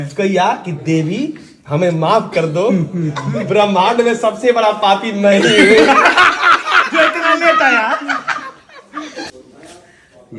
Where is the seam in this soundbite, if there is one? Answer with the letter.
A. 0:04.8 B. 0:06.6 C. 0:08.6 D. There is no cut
D